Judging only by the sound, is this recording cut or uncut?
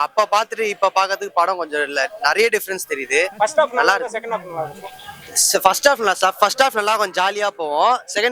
uncut